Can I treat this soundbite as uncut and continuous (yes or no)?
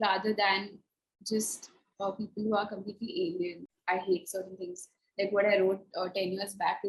no